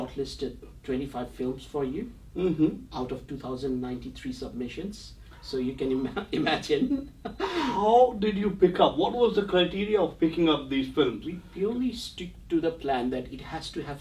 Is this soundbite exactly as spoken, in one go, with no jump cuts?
yes; 0 cuts

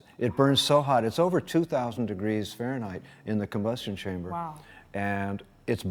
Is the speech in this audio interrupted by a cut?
no; 0 cuts

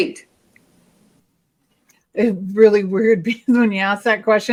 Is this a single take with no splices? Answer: yes; 0 cuts

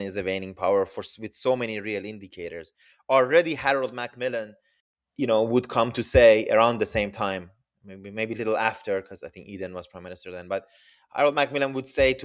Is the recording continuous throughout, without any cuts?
yes; 0 cuts

